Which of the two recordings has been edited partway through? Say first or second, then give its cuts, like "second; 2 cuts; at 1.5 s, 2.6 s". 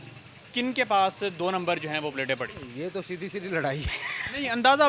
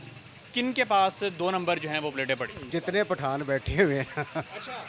second; 1 cut; at 2.6 s